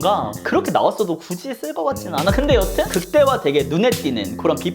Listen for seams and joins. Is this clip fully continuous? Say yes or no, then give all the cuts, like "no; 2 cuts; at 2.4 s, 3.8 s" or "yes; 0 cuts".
no; 1 cut; at 2.9 s